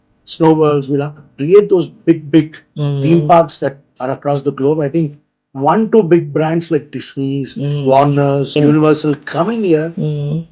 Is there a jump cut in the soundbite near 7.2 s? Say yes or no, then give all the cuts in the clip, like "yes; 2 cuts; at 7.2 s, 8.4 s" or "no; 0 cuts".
no; 1 cut; at 8.6 s